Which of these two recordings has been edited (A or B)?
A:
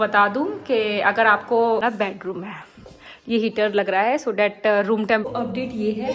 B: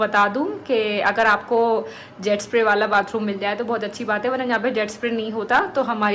A